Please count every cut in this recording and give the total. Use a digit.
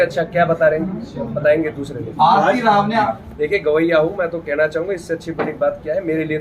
1